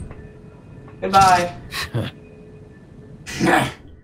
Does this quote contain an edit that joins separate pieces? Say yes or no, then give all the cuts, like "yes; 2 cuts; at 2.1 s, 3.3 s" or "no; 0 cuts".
no; 0 cuts